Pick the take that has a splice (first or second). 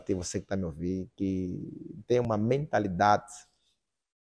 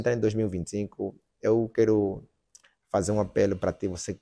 first